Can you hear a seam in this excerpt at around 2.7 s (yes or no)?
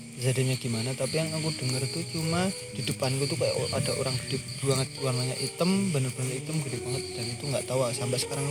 yes